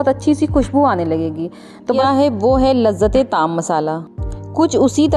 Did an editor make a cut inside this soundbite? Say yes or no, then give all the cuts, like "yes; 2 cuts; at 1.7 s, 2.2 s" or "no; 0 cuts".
yes; 1 cut; at 2.0 s